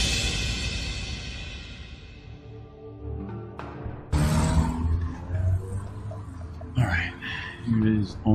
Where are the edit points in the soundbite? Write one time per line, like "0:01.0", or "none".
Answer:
none